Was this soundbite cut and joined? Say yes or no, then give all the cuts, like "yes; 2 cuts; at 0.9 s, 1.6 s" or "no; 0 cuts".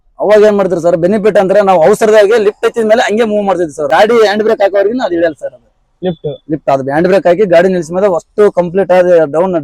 yes; 1 cut; at 3.9 s